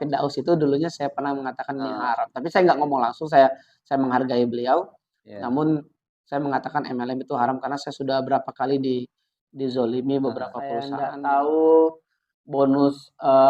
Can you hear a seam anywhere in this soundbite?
yes; 1 cut; at 10.9 s

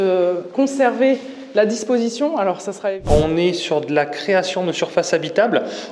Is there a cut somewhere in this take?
yes; 1 cut; at 3.0 s

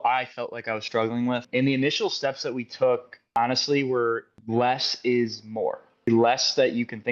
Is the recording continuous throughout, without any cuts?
no; 4 cuts; at 1.5 s, 3.3 s, 4.3 s, 6.1 s

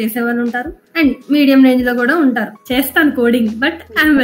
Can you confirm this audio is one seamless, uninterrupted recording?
no; 1 cut; at 2.5 s

